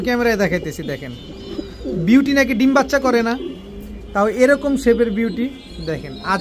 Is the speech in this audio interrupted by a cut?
no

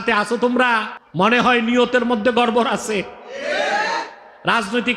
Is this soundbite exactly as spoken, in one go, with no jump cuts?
no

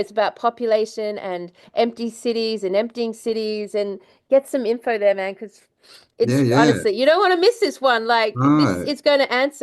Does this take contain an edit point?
no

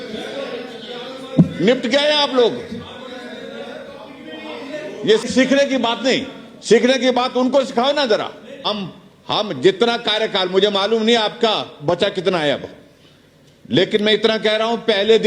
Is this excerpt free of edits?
no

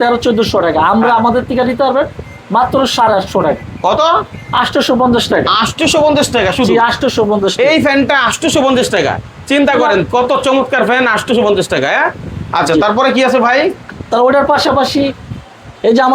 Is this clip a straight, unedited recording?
yes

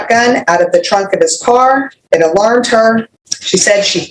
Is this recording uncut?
no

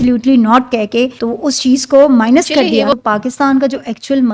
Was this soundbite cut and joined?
yes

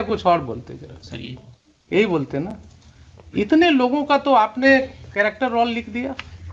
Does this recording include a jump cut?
no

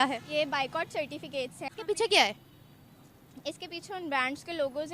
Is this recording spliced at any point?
yes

